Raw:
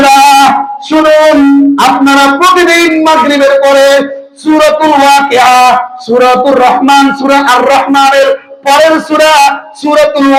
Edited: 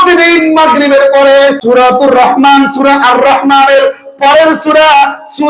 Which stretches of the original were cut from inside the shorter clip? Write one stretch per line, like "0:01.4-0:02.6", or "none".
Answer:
0:04.1-0:06.0

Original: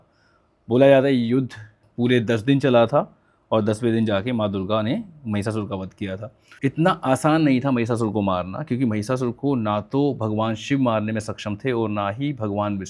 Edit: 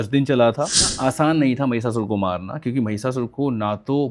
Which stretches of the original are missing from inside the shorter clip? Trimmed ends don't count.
0:03.3-0:07.0

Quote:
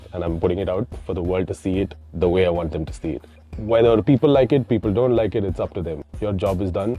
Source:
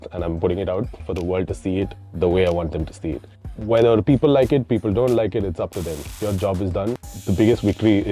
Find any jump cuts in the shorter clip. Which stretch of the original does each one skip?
none

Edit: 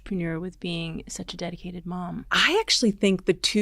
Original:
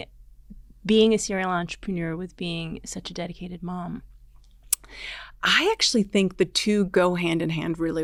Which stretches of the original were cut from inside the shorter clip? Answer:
0:04.0-0:05.4

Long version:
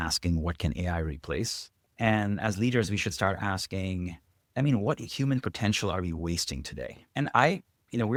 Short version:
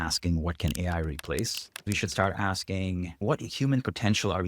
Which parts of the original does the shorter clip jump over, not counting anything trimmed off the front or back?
0:01.9-0:02.9
0:04.3-0:04.8

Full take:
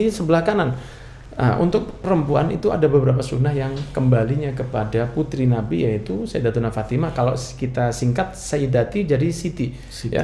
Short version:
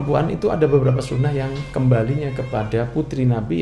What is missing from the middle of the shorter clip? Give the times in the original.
none

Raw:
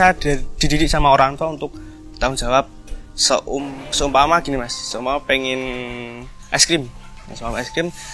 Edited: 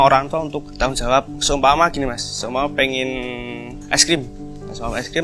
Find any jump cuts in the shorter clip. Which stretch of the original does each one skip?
0:02.2-0:03.6
0:06.2-0:06.3

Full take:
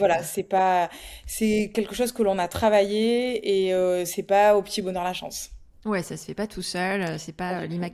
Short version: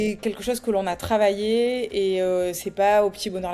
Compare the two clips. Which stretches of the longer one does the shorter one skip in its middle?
none

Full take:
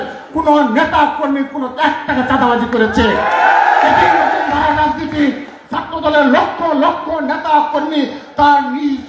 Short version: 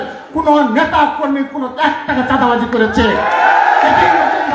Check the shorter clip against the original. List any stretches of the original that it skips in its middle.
none

